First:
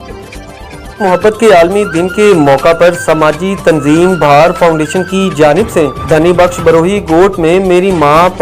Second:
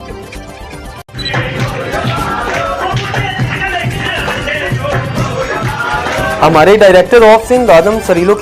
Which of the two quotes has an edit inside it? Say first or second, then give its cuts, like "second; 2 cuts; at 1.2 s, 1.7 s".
first; 1 cut; at 1.0 s